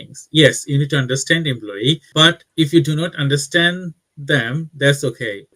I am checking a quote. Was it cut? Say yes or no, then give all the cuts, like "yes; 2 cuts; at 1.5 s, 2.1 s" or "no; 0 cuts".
no; 0 cuts